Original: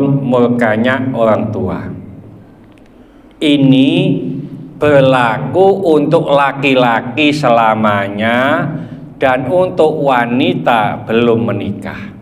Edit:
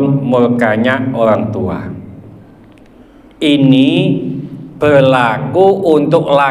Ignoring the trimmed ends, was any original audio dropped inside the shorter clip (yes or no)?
no